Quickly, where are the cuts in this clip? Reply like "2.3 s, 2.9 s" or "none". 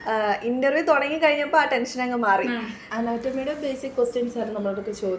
2.8 s